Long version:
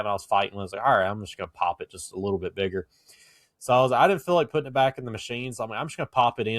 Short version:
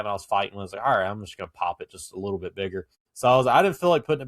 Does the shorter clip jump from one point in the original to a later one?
yes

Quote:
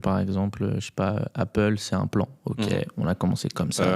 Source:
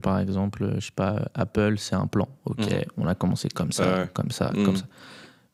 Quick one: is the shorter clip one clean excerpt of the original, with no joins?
yes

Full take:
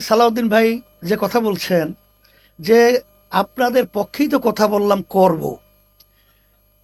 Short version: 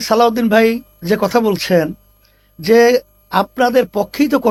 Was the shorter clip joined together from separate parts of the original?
no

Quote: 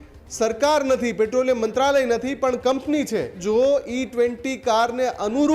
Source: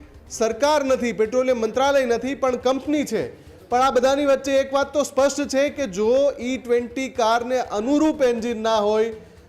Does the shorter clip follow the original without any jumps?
no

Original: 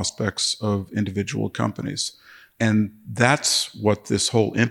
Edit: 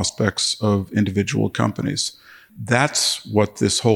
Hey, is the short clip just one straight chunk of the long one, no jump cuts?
no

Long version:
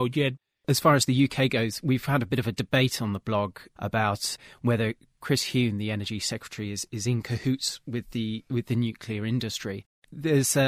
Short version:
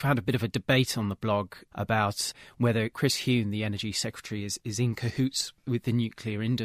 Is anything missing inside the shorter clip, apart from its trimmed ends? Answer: yes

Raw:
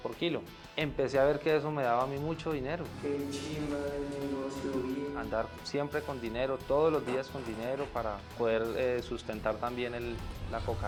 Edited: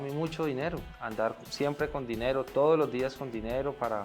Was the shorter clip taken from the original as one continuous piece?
no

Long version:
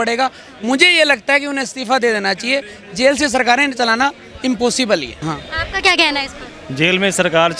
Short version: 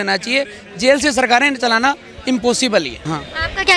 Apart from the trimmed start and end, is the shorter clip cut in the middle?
no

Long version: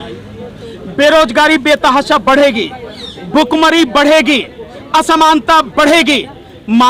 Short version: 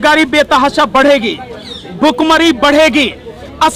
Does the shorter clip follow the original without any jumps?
yes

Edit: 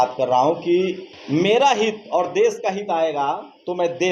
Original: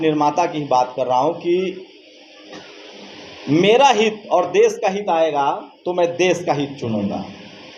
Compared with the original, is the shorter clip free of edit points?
no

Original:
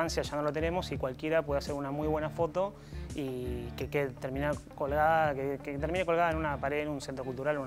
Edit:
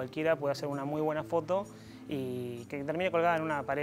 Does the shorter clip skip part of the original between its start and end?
yes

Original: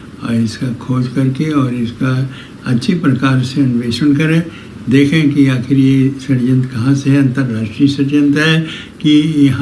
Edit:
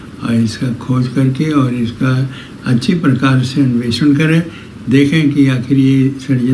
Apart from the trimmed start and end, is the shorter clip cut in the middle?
no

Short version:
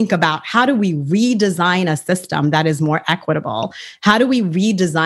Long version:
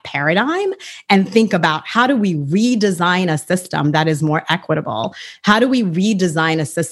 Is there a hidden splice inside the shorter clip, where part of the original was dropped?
no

